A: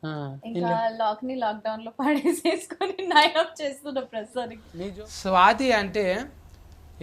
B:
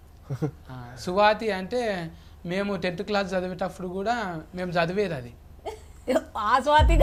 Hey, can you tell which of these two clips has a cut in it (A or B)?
A